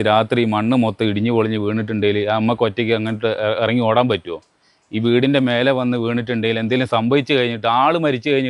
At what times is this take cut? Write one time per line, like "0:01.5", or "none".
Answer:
none

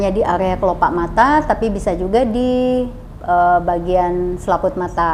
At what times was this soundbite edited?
none

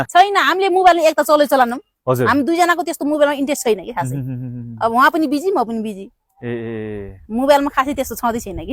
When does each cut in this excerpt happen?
none

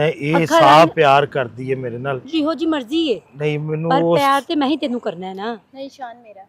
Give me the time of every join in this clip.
0:02.3

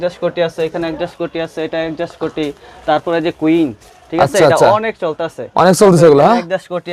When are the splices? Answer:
none

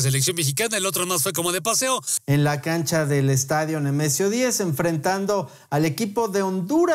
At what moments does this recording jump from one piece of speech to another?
0:02.1

